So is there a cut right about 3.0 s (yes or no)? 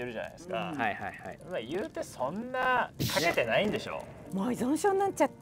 yes